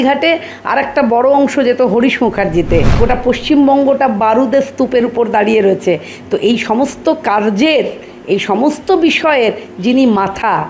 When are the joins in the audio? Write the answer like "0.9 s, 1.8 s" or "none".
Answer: 2.9 s

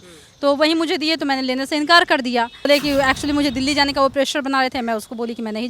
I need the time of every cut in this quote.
2.7 s

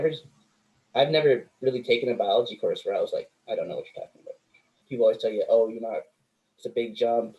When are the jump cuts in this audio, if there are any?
4.8 s

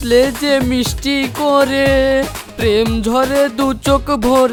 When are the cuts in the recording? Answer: none

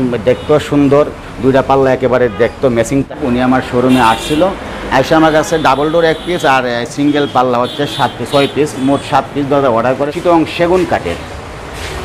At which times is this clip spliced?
3.1 s, 10.1 s

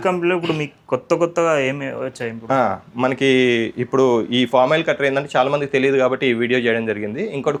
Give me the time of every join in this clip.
none

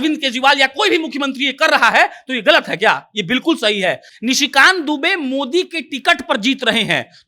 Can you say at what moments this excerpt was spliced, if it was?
4.1 s

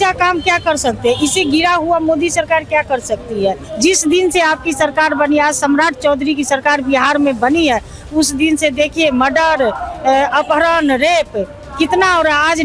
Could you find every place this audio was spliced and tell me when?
3.7 s

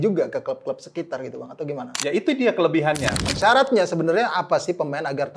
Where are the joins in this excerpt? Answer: 3.3 s

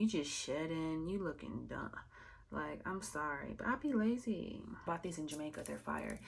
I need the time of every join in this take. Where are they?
4.9 s

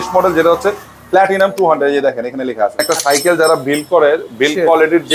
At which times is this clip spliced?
2.8 s

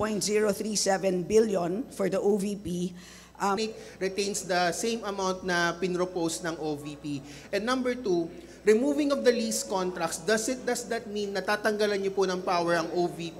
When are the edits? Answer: 3.6 s

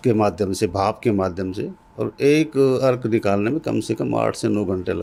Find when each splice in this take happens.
none

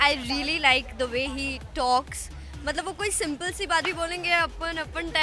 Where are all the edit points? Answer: none

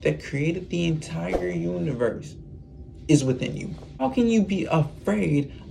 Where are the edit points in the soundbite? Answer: 4.0 s

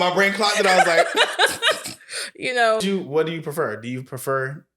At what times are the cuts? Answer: 2.8 s

